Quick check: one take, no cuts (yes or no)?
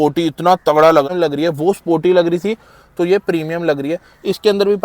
no